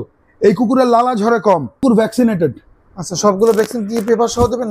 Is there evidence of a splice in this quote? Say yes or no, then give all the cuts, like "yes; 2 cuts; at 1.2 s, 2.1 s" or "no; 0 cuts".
yes; 1 cut; at 1.8 s